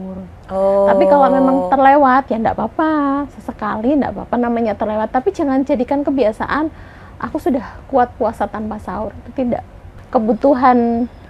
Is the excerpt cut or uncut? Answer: cut